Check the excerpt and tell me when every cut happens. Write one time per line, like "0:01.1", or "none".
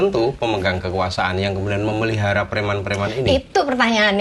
none